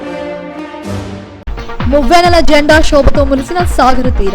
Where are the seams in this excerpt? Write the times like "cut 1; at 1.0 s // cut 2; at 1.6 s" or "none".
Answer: cut 1; at 1.0 s